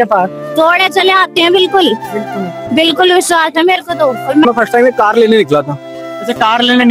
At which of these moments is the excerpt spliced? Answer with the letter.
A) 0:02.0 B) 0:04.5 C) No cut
B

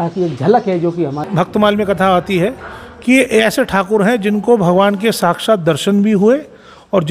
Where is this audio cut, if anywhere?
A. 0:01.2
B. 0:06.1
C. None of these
A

